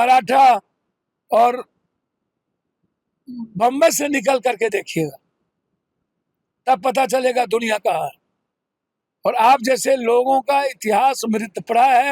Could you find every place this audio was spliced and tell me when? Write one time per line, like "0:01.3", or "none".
none